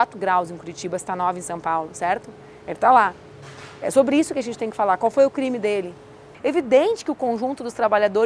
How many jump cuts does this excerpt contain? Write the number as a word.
one